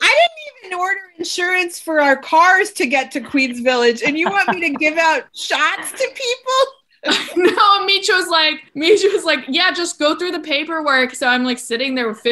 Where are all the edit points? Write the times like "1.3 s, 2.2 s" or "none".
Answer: 8.6 s